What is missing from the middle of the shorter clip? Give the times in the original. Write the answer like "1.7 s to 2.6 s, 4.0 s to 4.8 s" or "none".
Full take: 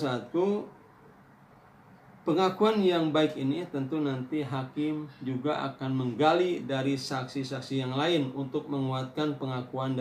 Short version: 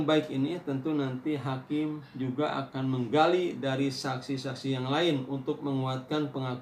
none